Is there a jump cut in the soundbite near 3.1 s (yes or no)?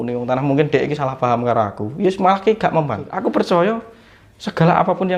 yes